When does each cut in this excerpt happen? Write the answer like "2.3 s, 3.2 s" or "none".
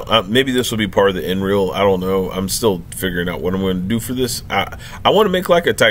none